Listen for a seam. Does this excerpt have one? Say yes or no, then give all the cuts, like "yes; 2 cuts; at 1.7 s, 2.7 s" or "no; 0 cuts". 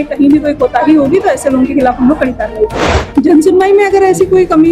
yes; 1 cut; at 2.8 s